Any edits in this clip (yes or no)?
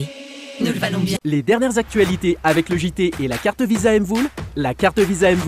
yes